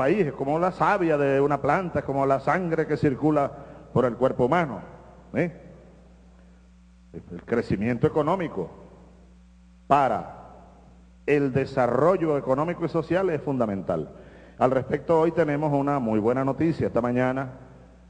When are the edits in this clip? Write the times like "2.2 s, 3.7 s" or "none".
15.8 s

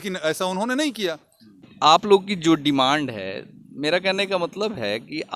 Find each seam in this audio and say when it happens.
1.5 s

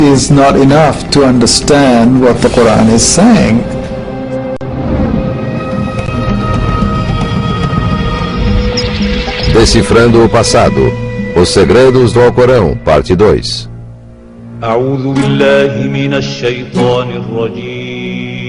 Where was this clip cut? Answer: 9.9 s

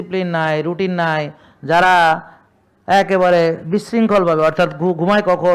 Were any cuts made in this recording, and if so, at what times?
none

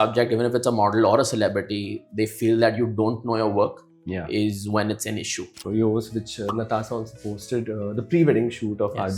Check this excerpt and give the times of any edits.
5.6 s

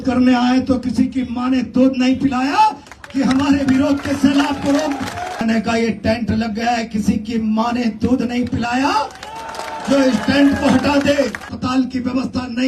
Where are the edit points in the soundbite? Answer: 5.4 s, 11.5 s

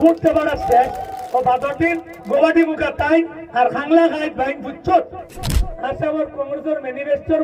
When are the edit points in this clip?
1.1 s, 2.1 s, 3.4 s, 5.7 s

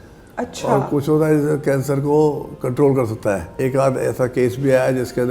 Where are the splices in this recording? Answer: 3.5 s

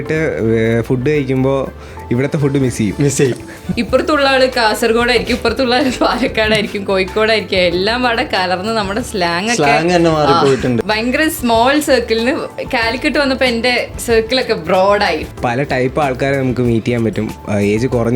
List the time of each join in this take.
3.6 s, 10.8 s, 15.2 s

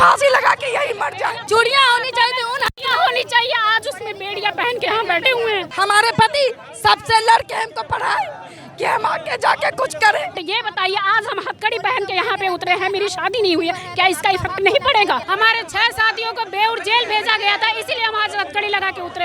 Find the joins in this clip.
1.4 s, 5.7 s, 10.5 s, 15.2 s

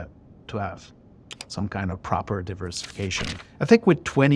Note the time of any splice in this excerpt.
none

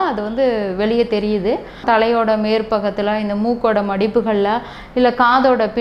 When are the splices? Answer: 1.8 s

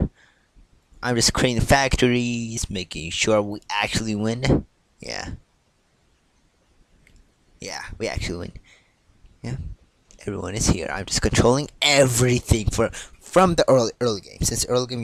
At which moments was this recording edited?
none

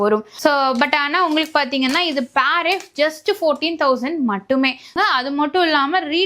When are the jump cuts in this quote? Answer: 5.0 s

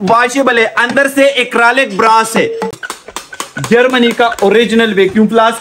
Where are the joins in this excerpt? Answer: 2.9 s

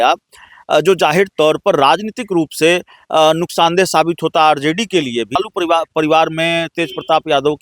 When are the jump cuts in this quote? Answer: 5.4 s

